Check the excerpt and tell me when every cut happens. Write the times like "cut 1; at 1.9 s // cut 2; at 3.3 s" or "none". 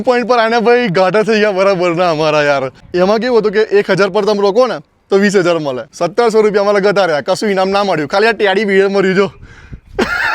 cut 1; at 2.8 s // cut 2; at 5.8 s